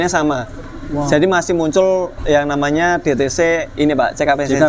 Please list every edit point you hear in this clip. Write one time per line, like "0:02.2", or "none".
none